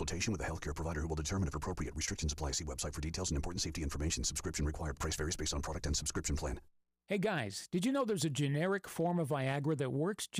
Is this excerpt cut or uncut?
uncut